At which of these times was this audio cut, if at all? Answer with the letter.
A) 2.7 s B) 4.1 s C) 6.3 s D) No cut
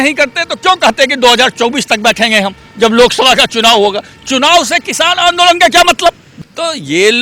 C